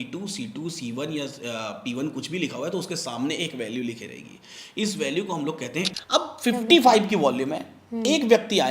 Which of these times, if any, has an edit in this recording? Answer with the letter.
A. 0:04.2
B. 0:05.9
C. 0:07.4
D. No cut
B